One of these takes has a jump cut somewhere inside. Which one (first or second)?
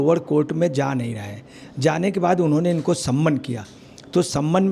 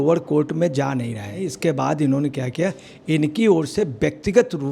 second